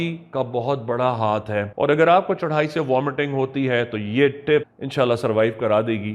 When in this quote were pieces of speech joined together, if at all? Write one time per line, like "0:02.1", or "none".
0:01.7
0:04.8